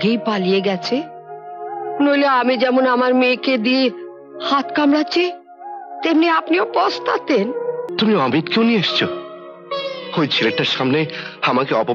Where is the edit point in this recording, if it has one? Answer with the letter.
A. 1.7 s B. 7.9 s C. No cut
B